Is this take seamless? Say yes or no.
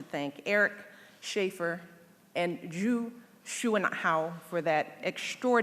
no